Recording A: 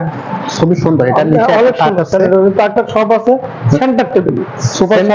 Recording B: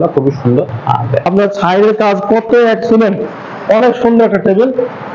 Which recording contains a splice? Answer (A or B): B